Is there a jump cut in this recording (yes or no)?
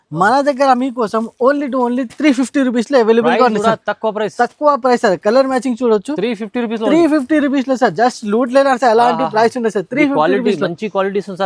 no